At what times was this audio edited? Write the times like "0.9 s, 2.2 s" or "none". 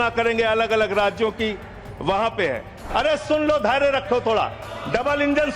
2.7 s